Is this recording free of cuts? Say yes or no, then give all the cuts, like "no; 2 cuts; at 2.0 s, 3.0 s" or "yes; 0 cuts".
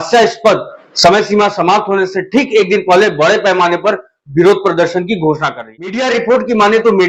no; 1 cut; at 6.0 s